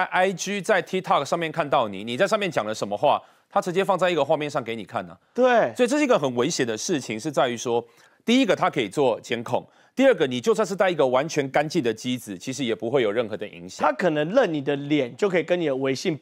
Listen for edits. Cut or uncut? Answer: uncut